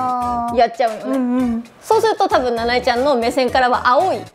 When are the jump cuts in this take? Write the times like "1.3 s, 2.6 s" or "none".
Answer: 1.7 s